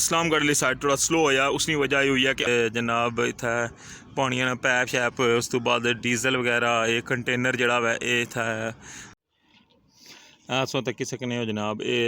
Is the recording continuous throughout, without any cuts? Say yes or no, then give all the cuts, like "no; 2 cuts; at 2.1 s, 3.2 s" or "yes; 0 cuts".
no; 2 cuts; at 2.5 s, 9.1 s